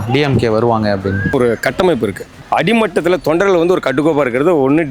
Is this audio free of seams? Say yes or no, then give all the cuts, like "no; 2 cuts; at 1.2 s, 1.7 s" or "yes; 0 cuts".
no; 2 cuts; at 1.3 s, 2.3 s